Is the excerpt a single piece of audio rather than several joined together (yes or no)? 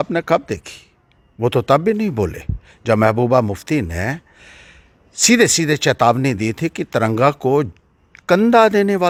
yes